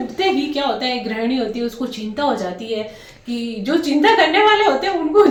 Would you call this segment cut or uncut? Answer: uncut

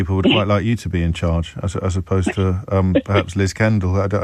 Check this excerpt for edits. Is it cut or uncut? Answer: uncut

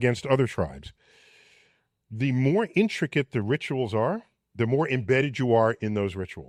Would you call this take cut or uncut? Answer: uncut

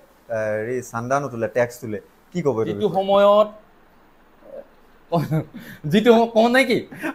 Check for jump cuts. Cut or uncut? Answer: cut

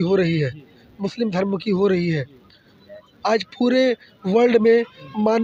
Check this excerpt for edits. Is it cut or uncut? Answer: uncut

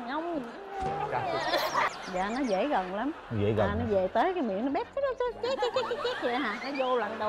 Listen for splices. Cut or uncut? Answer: cut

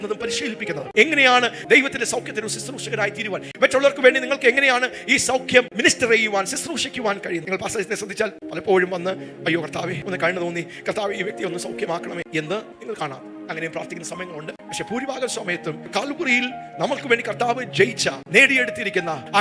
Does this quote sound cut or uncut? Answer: cut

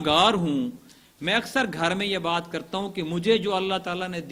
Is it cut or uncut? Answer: uncut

